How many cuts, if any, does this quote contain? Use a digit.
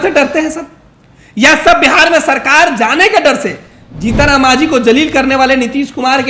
0